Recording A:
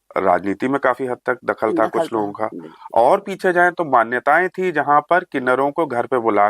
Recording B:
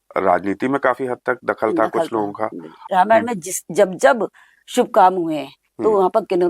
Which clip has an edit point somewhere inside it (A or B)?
B